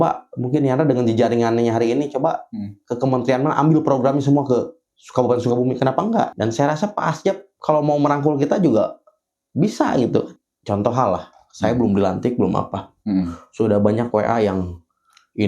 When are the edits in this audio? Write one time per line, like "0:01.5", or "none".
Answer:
0:06.3
0:10.4